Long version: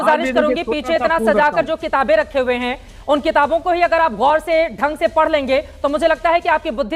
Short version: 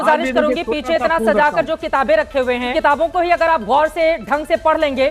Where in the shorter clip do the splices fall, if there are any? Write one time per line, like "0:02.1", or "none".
0:02.7